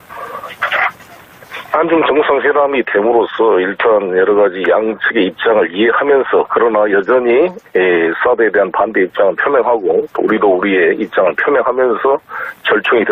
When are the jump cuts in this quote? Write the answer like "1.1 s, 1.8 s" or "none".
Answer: 12.2 s